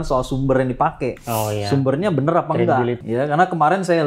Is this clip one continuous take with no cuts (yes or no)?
no